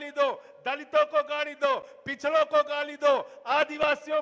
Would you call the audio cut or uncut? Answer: uncut